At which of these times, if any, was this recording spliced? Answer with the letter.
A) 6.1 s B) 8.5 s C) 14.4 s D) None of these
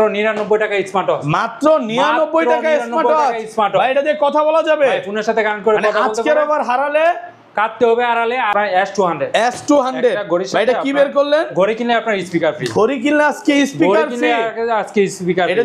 B